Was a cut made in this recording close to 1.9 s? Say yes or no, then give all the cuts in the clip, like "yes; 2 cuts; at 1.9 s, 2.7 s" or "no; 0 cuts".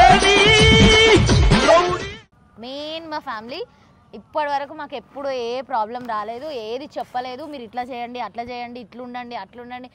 yes; 1 cut; at 1.9 s